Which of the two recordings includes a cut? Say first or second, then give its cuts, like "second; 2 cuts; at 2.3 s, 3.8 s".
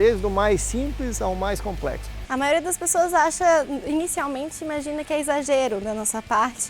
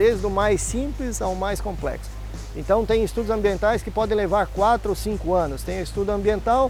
first; 1 cut; at 2.2 s